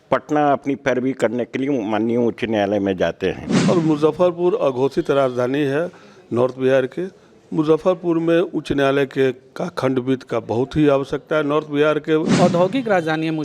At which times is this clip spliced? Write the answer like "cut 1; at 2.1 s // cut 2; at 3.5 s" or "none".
cut 1; at 3.5 s // cut 2; at 12.3 s